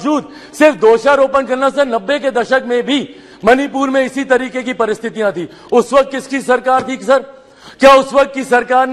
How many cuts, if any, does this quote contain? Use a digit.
0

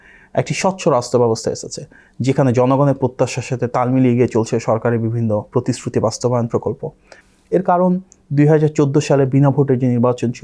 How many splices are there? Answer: 0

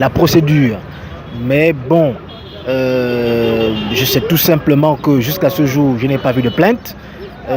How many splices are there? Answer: 0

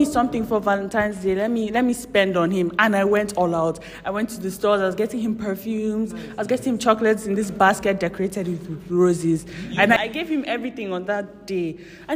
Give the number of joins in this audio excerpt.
1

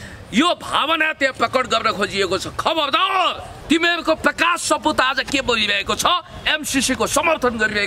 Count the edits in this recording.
1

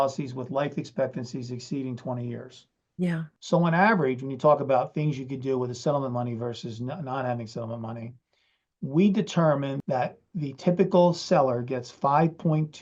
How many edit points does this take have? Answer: 2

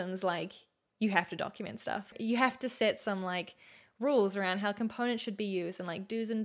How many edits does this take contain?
1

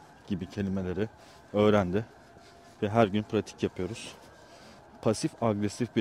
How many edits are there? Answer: 1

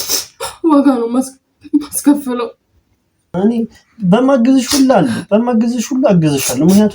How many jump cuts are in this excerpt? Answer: 1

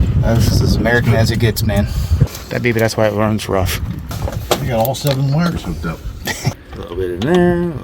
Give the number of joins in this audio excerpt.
3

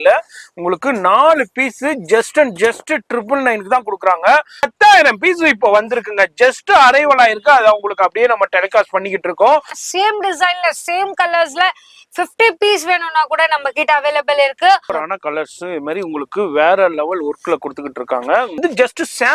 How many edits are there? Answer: 4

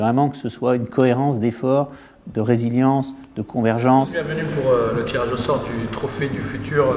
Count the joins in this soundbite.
1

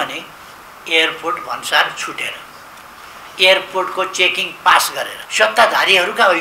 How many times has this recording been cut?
1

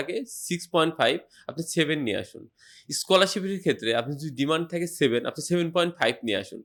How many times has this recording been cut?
0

